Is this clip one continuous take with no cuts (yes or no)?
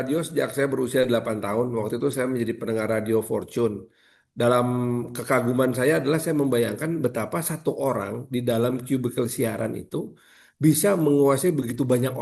yes